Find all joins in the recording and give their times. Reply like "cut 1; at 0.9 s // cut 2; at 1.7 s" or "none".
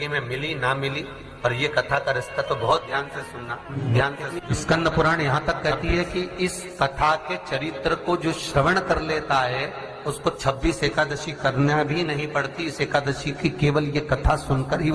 cut 1; at 3.7 s // cut 2; at 4.4 s